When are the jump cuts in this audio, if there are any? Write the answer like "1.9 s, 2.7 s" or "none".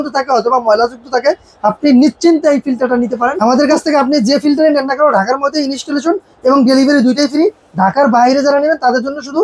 3.4 s